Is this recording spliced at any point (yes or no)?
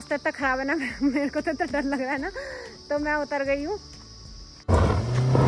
no